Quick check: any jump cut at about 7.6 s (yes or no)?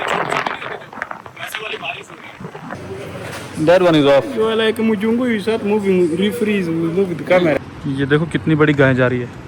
yes